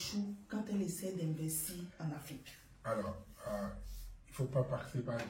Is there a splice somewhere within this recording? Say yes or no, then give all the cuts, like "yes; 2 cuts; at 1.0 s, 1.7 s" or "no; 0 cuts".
no; 0 cuts